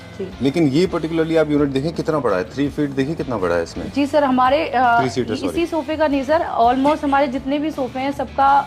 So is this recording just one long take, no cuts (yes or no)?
yes